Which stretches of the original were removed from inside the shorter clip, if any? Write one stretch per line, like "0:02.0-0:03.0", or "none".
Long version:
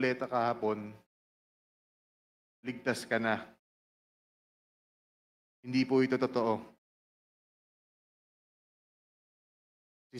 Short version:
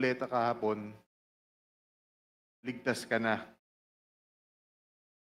none